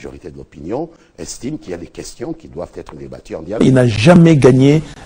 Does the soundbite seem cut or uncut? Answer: cut